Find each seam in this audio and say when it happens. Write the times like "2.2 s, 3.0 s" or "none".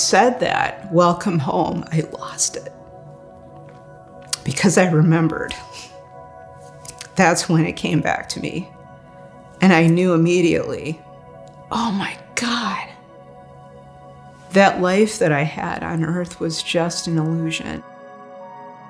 17.8 s